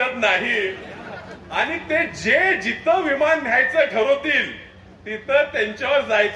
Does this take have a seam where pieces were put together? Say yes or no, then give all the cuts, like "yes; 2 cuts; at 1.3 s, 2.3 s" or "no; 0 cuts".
no; 0 cuts